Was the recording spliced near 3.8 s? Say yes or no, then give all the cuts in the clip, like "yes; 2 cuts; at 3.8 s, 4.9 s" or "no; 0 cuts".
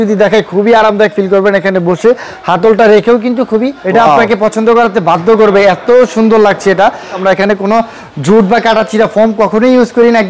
yes; 2 cuts; at 3.8 s, 7.2 s